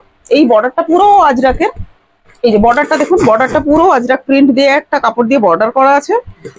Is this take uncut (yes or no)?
yes